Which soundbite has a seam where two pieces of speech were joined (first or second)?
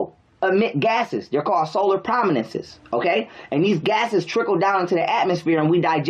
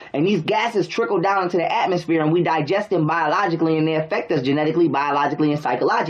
second